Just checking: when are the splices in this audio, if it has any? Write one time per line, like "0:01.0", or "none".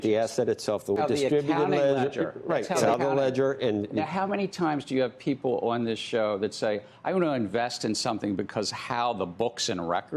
0:01.0
0:02.9